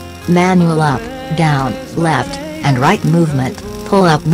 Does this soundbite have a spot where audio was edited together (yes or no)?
no